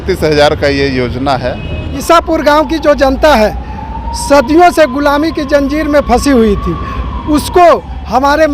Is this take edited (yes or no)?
yes